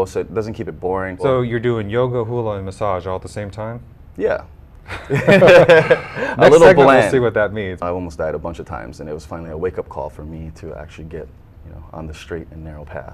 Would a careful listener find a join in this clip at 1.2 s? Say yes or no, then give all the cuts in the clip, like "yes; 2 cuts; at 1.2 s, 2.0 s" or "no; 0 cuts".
yes; 2 cuts; at 1.2 s, 7.8 s